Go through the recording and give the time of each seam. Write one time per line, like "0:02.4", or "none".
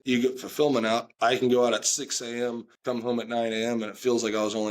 0:02.7